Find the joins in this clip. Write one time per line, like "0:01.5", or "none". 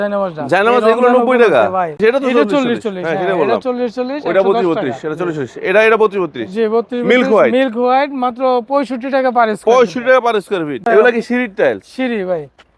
0:02.0
0:10.9